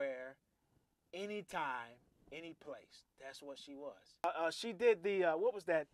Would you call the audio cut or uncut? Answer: cut